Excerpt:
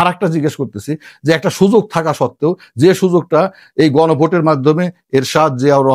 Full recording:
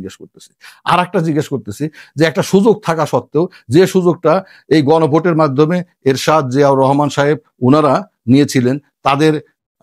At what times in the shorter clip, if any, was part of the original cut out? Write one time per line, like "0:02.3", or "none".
none